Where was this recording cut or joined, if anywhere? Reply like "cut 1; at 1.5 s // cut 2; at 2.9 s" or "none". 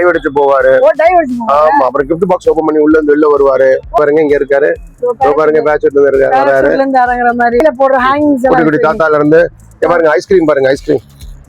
cut 1; at 4.0 s // cut 2; at 7.6 s